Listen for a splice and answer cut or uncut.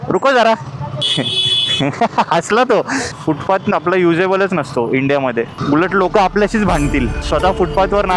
cut